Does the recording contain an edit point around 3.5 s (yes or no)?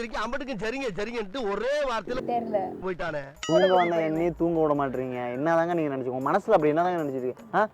yes